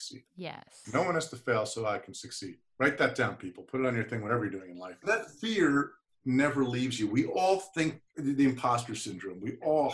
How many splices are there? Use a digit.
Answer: 1